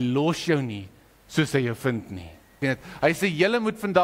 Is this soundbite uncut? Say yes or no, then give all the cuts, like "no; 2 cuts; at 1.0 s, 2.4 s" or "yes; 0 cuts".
no; 1 cut; at 2.9 s